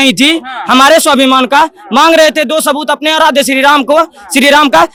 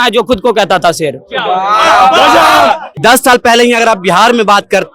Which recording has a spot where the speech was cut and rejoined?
second; 1 cut; at 2.9 s

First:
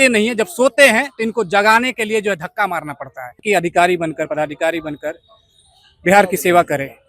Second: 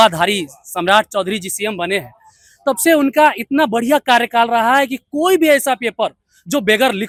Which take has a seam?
first; 1 cut; at 3.4 s

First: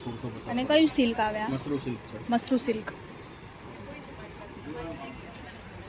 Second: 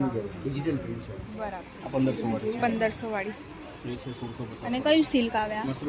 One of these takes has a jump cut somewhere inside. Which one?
second; 1 cut; at 1.5 s

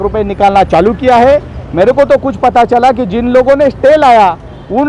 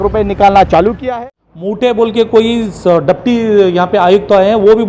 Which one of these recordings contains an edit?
second; 1 cut; at 1.1 s

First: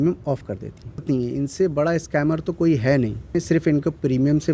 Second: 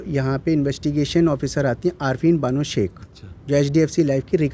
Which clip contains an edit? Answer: first; 2 cuts; at 1.0 s, 3.3 s

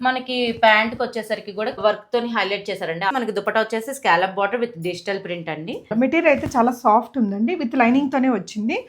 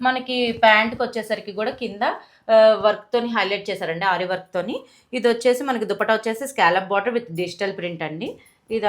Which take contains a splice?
first; 3 cuts; at 1.8 s, 3.1 s, 5.9 s

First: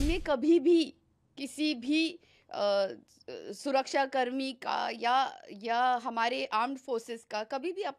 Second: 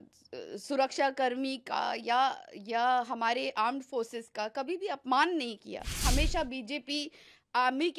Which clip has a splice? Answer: second; 1 cut; at 6.0 s

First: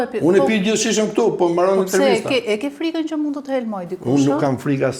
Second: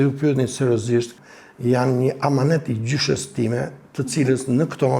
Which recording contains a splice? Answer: second; 1 cut; at 1.2 s

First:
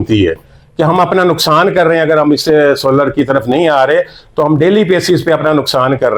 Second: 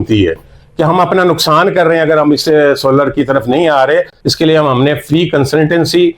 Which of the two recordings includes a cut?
second; 1 cut; at 4.2 s

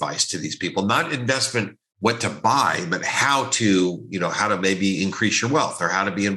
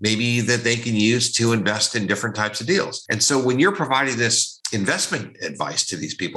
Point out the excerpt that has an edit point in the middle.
second; 2 cuts; at 3.1 s, 4.5 s

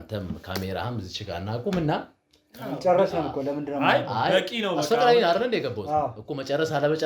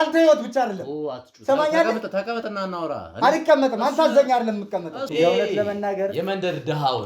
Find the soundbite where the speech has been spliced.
second; 1 cut; at 5.0 s

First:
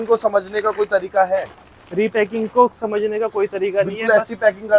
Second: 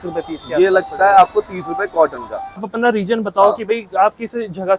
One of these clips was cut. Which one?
second; 1 cut; at 2.7 s

